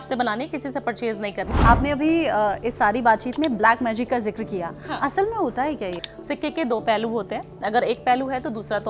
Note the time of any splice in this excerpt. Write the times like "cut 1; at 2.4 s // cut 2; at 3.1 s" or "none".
cut 1; at 1.5 s // cut 2; at 6.0 s